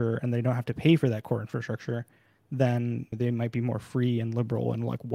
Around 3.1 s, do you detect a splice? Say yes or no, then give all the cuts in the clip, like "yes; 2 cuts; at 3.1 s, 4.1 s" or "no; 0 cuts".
yes; 1 cut; at 3.1 s